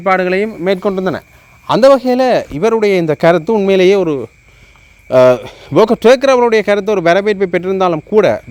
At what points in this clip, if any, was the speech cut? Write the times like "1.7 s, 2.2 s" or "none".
none